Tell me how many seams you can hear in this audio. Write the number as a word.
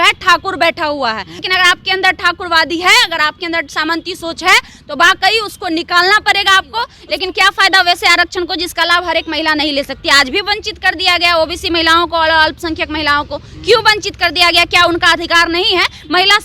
two